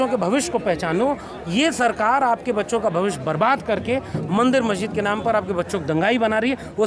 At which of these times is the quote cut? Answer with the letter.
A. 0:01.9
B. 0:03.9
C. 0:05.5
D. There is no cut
D